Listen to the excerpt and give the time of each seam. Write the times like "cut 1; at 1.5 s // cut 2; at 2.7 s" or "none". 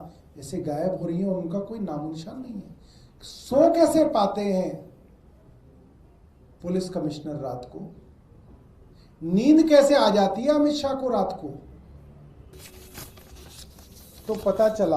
cut 1; at 12.5 s